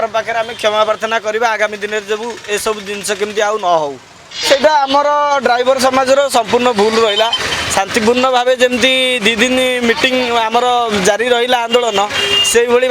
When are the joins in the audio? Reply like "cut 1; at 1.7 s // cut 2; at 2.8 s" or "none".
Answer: cut 1; at 4.4 s